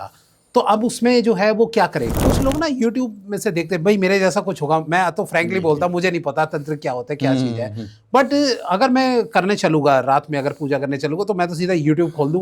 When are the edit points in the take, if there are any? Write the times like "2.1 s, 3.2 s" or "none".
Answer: 2.2 s

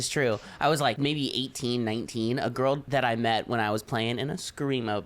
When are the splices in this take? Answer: 1.0 s, 2.8 s

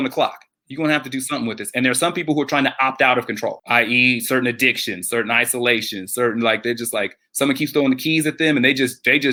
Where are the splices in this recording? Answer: none

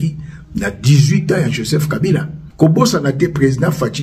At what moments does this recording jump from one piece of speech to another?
2.4 s

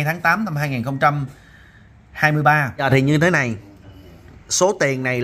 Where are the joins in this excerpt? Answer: 2.8 s

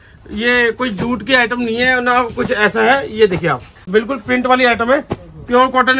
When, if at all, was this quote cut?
3.7 s

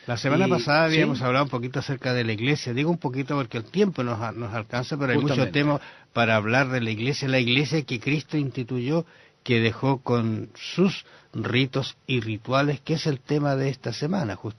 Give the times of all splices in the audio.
5.2 s

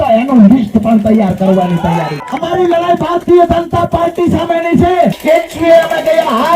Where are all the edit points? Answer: 2.2 s, 5.2 s

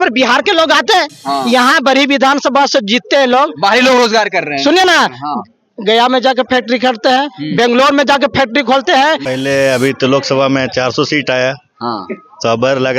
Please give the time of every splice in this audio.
9.2 s

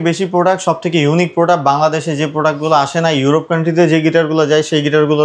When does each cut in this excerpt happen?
none

